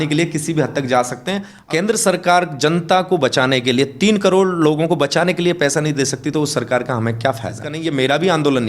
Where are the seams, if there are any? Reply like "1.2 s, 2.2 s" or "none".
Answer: 1.5 s, 7.7 s